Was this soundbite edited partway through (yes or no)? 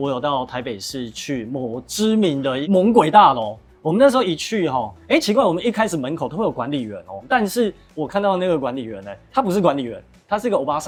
no